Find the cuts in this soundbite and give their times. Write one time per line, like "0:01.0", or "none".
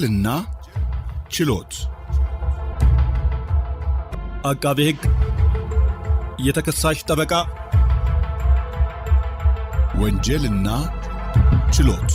none